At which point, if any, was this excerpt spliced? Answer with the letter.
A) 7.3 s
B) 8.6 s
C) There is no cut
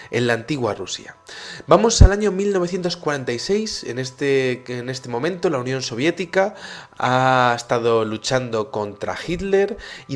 C